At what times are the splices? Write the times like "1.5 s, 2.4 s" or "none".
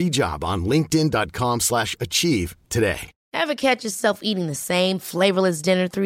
3.1 s